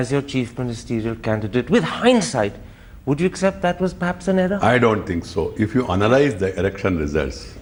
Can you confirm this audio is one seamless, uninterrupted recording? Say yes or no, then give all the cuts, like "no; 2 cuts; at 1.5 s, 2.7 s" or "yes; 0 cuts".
yes; 0 cuts